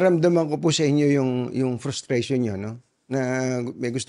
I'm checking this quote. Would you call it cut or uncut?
uncut